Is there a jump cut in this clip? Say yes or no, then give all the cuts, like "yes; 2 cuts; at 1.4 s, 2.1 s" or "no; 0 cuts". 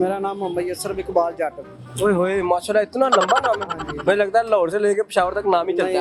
no; 0 cuts